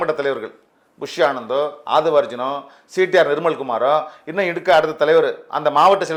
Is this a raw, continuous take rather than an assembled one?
yes; 0 cuts

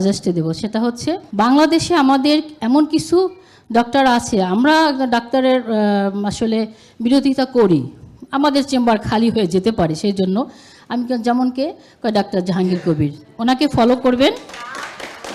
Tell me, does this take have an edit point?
yes; 1 cut; at 1.3 s

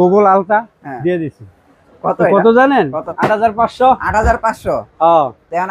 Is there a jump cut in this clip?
yes; 1 cut; at 3.0 s

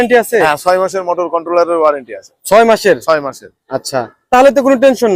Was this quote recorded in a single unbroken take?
yes; 0 cuts

